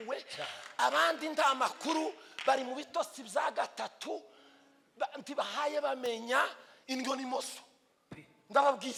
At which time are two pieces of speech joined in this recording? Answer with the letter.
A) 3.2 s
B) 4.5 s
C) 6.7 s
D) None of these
D